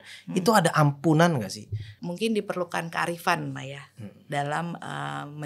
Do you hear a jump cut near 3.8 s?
no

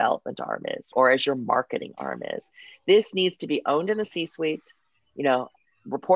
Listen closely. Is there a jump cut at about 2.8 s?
no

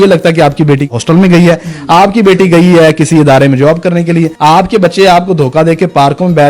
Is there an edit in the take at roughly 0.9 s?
yes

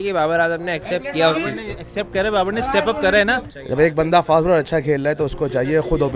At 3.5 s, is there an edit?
yes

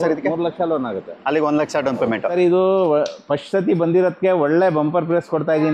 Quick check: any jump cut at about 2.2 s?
yes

